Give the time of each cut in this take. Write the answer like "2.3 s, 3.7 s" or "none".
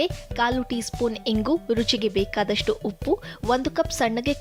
none